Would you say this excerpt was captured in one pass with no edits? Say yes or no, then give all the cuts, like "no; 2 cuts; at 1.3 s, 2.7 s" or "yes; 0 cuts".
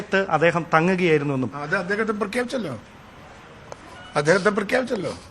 no; 1 cut; at 1.8 s